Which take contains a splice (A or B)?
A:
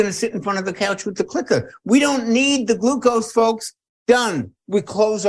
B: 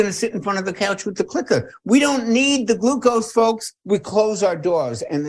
B